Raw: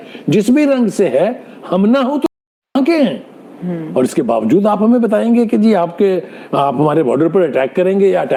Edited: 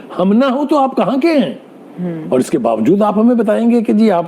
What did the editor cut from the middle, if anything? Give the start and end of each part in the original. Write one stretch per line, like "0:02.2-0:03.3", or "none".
0:02.5-0:02.6